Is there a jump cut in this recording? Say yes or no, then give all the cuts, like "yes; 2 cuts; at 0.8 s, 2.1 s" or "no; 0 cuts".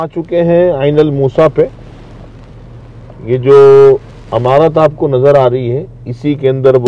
no; 0 cuts